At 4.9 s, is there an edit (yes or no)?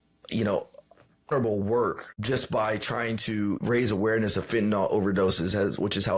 no